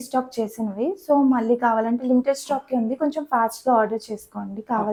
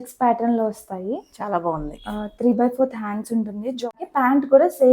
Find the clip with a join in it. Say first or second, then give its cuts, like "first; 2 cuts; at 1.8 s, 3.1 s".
second; 1 cut; at 3.9 s